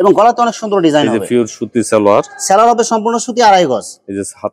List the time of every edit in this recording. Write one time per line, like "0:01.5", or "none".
none